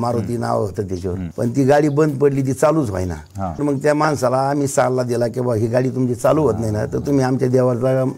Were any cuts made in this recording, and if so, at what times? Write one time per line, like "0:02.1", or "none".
0:03.6